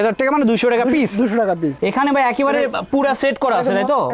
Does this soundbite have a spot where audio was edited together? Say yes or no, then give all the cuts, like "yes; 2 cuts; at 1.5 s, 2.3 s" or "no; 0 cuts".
yes; 1 cut; at 1.8 s